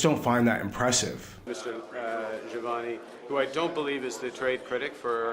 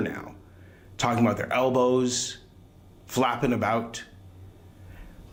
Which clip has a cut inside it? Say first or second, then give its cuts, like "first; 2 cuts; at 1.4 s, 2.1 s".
first; 1 cut; at 1.5 s